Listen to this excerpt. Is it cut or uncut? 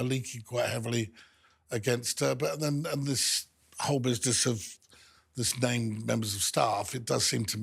uncut